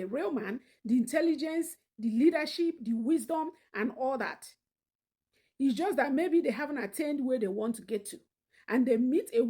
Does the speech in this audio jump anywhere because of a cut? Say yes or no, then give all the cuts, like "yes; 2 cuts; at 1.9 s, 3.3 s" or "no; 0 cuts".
no; 0 cuts